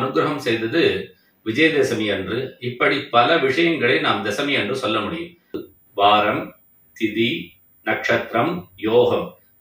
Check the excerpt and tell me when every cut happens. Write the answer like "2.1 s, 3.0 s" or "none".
5.7 s